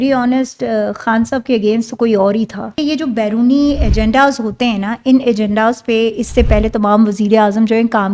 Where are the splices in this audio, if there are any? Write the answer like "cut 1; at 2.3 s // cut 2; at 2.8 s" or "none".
cut 1; at 2.8 s